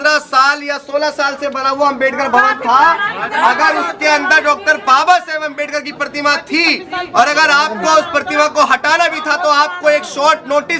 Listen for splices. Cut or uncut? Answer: uncut